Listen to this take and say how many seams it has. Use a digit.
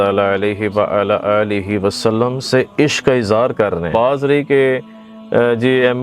1